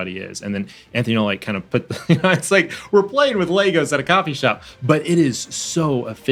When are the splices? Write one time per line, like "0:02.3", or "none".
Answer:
none

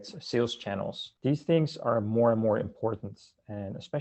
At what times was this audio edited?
0:01.0

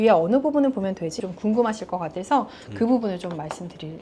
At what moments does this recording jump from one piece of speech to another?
0:01.2

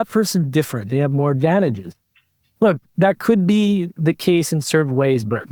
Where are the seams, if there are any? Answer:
none

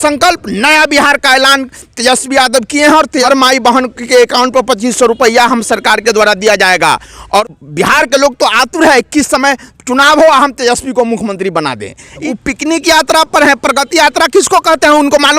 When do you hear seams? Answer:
0:03.2
0:07.4
0:12.2

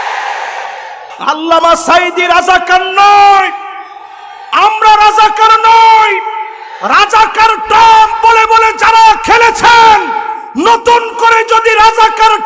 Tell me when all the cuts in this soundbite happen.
0:01.1

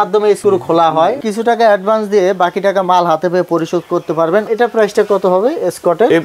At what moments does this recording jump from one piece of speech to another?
0:01.2
0:04.5

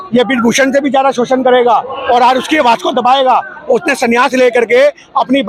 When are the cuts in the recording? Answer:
none

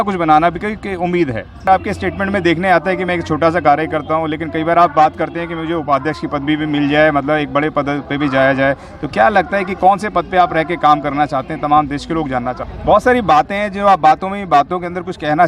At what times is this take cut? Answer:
0:01.7
0:12.7

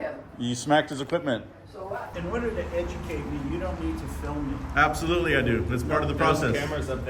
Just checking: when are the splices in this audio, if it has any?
0:02.1

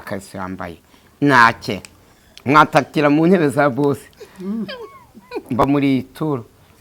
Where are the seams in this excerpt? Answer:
none

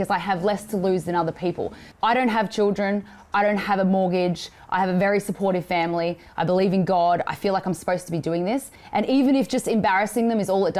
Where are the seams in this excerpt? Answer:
0:01.8
0:08.8

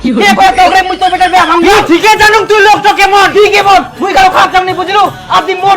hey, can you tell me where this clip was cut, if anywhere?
0:01.7

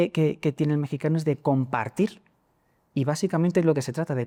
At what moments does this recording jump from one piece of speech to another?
none

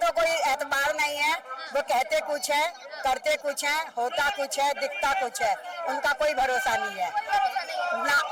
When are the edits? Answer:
none

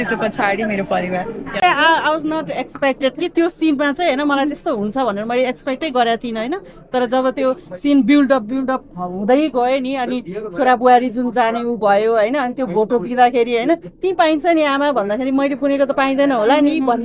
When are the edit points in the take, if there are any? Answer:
0:01.6

